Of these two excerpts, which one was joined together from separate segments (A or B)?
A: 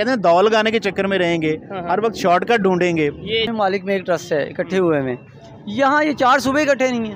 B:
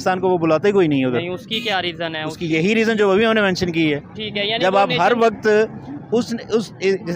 A